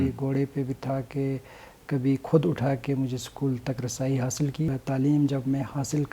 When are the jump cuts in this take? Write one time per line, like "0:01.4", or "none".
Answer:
0:04.7